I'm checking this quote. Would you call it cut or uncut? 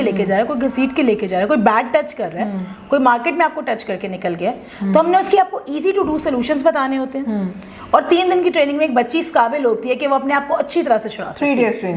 uncut